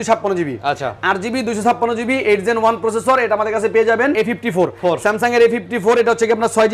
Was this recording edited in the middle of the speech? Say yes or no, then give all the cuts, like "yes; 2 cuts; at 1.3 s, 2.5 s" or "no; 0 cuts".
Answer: yes; 1 cut; at 4.1 s